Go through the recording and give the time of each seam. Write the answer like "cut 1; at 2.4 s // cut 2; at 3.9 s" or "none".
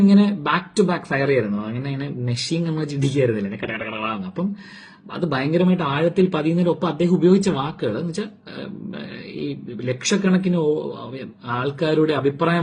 none